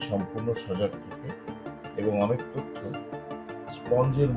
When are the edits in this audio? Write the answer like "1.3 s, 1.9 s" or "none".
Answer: none

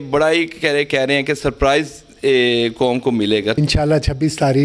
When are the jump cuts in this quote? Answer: 3.6 s

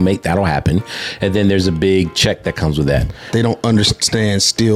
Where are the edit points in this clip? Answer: 3.3 s

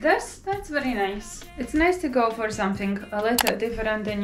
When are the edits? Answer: 1.5 s

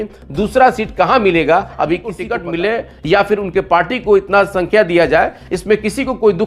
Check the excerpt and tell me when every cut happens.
2.3 s

